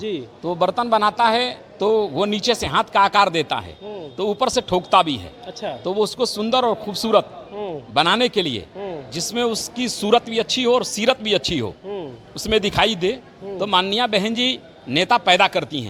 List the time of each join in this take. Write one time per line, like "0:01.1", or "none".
none

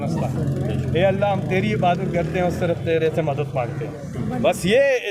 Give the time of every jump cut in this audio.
none

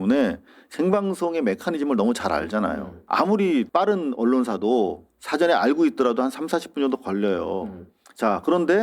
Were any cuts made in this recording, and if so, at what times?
0:02.9
0:03.7

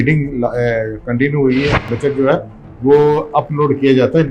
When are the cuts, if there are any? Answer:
0:01.9

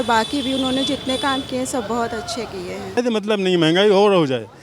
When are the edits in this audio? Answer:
0:03.0

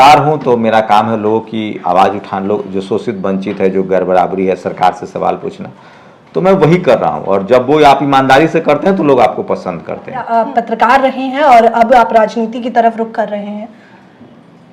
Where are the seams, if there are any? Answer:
0:10.3

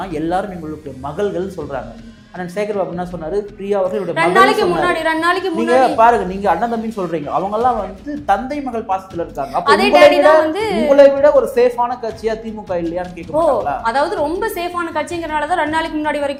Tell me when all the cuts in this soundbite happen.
none

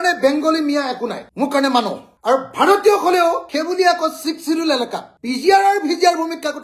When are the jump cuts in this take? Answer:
0:02.0

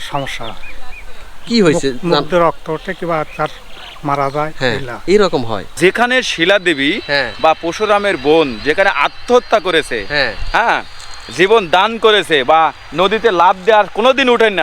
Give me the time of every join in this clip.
0:05.7

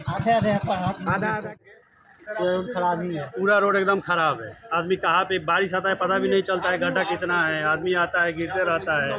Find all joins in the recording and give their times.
0:01.6

